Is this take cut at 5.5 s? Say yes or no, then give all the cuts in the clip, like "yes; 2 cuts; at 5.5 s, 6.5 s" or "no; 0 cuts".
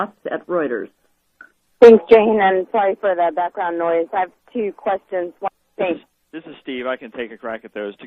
no; 0 cuts